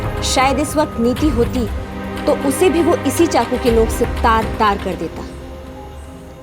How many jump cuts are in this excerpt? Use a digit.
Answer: 0